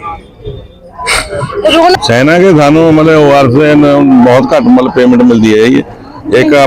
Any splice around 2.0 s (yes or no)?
yes